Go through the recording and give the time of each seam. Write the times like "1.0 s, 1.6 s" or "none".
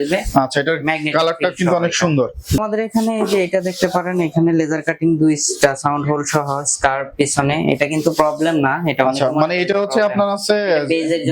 2.6 s

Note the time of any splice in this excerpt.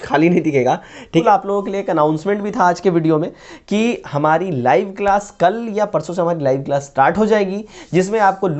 1.2 s

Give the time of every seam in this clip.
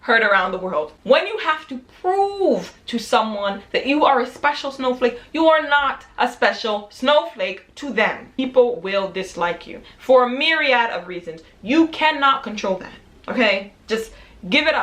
0.9 s, 8.3 s

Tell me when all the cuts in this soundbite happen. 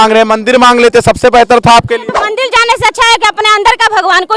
2.2 s

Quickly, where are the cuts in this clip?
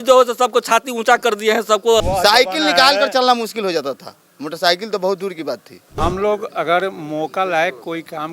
2.0 s, 5.9 s

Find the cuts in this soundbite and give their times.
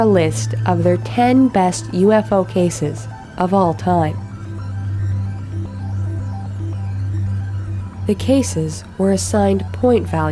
8.3 s

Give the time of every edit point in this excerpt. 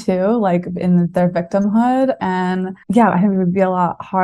2.7 s

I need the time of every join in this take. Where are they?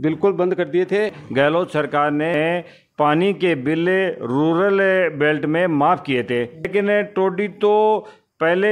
1.2 s, 6.7 s

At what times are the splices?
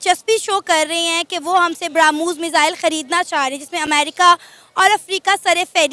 none

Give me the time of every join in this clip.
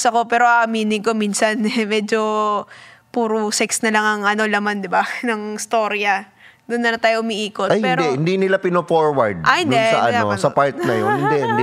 none

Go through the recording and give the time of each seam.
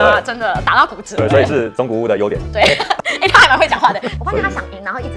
4.2 s

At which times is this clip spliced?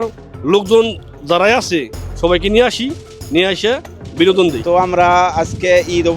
4.6 s

